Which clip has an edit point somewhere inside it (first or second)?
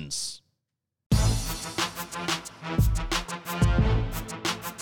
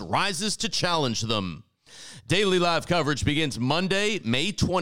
first